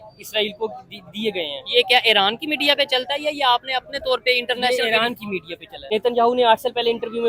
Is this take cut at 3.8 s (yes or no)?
no